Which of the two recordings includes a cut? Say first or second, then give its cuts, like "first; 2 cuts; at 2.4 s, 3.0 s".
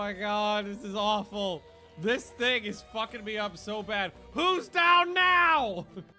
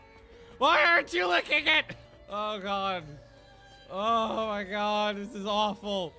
second; 1 cut; at 1.7 s